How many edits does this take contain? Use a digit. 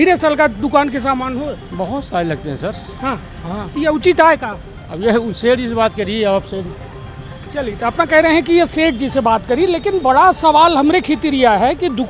0